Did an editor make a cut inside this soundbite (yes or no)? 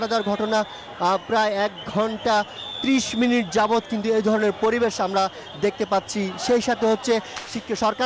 no